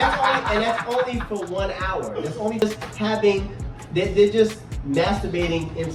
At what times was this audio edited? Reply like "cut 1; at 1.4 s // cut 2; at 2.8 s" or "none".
cut 1; at 2.6 s